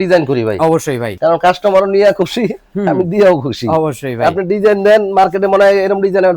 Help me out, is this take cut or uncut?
uncut